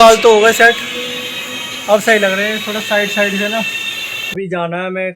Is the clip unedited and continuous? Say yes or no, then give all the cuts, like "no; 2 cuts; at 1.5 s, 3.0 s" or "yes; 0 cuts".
no; 1 cut; at 4.1 s